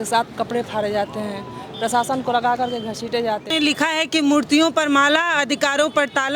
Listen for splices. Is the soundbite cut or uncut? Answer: cut